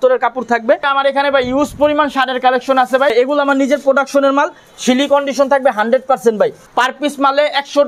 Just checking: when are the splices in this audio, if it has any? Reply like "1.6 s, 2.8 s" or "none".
0.9 s, 3.1 s, 6.6 s